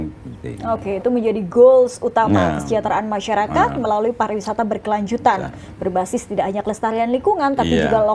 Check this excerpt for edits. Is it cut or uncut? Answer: uncut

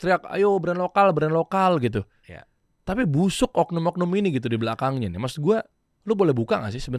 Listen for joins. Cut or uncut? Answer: uncut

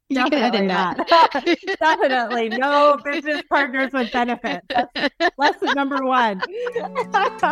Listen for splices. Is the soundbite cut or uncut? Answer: uncut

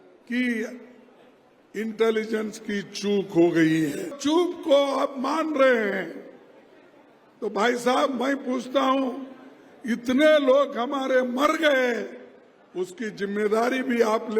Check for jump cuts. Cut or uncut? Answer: cut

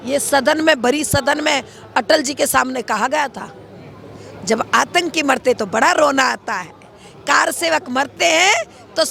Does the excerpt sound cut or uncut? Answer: uncut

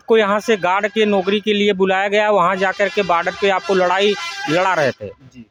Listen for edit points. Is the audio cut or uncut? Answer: uncut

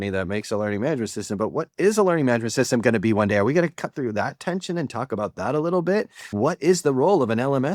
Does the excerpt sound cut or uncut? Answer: uncut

